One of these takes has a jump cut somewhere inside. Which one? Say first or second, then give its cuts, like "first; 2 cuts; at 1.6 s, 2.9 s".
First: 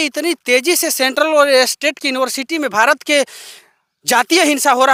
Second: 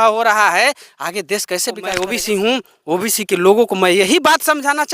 second; 1 cut; at 2.0 s